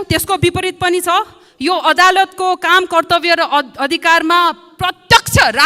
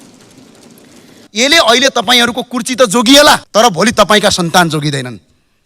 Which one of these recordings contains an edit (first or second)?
second